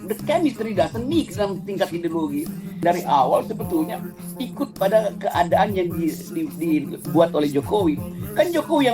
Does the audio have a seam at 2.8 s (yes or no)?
yes